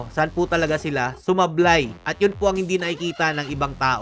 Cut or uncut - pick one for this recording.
uncut